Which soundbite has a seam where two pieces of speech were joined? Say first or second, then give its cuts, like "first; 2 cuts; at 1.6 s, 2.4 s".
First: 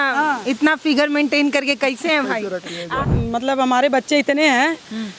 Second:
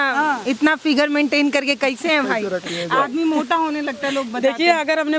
first; 1 cut; at 3.0 s